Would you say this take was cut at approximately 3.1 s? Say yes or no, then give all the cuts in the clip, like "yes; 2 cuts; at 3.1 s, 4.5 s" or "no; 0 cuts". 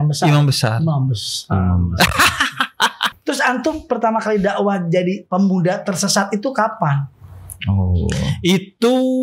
yes; 1 cut; at 3.1 s